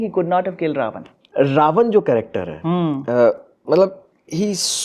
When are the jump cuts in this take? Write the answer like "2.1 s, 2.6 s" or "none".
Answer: 1.2 s